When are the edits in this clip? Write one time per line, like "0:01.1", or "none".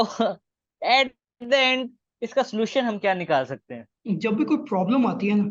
0:03.9